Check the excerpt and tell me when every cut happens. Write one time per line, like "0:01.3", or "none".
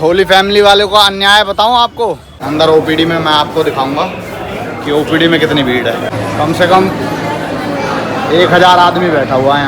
0:02.3
0:06.1